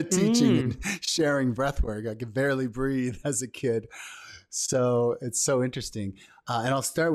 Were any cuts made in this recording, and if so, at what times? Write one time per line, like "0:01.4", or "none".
none